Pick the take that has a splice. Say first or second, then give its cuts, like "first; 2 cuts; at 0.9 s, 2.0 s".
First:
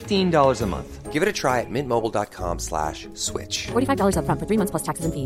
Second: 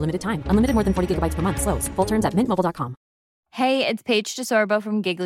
second; 1 cut; at 3.4 s